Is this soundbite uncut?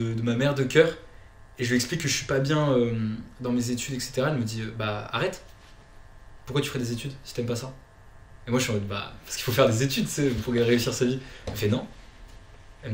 yes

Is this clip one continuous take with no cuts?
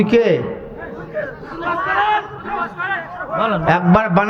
yes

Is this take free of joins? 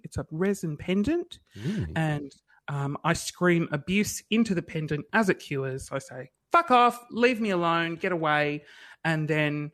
yes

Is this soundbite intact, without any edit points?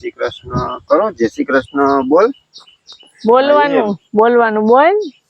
yes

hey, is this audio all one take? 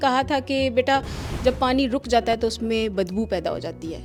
yes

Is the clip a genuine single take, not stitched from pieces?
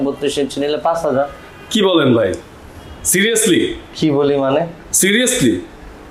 yes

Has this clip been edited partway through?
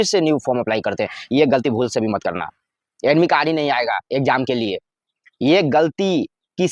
no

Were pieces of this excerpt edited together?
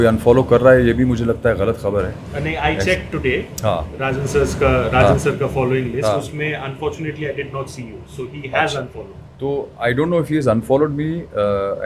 no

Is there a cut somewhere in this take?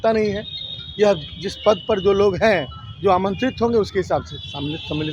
no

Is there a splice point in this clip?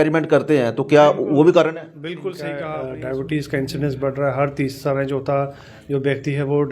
yes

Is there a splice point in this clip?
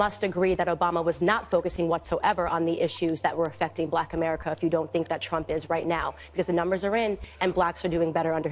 no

